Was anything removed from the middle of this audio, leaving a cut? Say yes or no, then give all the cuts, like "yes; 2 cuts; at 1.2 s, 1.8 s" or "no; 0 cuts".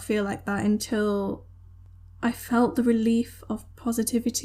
no; 0 cuts